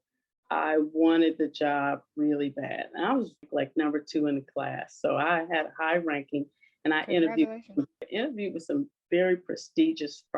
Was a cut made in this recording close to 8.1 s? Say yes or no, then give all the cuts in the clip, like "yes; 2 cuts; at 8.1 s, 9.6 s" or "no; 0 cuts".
yes; 2 cuts; at 3.5 s, 8.1 s